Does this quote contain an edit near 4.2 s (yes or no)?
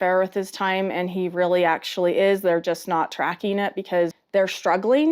yes